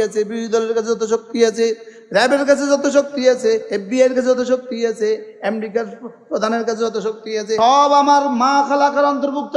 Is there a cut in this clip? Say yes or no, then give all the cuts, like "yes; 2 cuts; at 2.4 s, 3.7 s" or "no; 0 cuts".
yes; 2 cuts; at 3.7 s, 7.6 s